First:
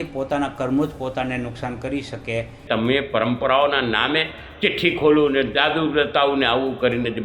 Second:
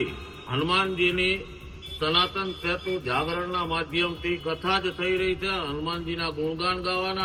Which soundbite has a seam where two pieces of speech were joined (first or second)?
first